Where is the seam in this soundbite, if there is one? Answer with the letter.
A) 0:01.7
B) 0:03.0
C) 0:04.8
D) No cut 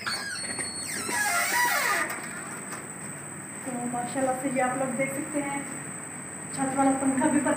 D